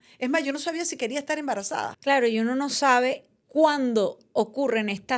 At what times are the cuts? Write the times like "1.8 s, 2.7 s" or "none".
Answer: 1.9 s